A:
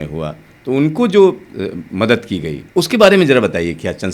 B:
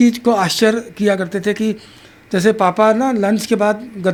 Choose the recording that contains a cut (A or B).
A